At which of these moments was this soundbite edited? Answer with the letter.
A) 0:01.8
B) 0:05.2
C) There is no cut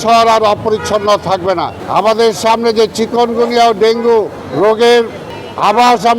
A